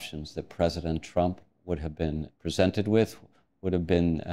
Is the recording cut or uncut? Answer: cut